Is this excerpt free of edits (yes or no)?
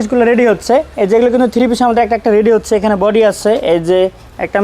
yes